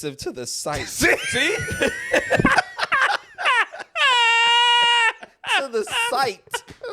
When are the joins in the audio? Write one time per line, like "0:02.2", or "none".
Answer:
none

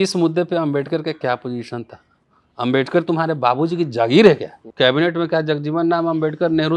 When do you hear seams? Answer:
0:04.6

